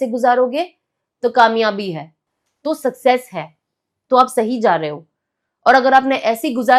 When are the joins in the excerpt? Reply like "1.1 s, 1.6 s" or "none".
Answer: none